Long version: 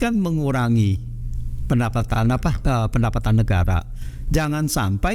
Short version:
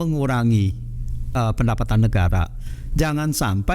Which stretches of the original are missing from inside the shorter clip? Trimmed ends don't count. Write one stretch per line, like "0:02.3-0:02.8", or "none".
0:01.5-0:02.6